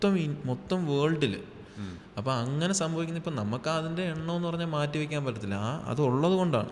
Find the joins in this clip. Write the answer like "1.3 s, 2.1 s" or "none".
none